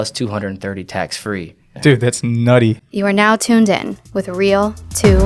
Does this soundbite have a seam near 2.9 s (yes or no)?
yes